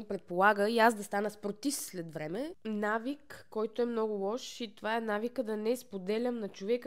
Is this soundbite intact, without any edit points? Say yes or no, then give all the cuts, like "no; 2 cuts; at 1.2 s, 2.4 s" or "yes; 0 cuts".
no; 1 cut; at 2.6 s